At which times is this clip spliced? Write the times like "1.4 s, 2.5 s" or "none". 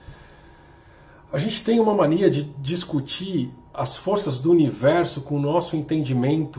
none